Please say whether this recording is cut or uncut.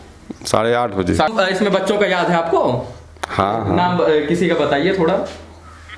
cut